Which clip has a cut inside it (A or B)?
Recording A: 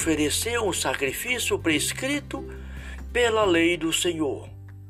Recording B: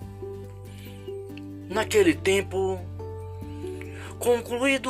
B